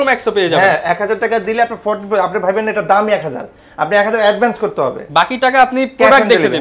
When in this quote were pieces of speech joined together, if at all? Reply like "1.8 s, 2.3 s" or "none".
none